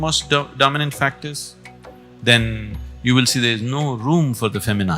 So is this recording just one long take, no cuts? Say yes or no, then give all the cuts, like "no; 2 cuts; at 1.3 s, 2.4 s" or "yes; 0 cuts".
yes; 0 cuts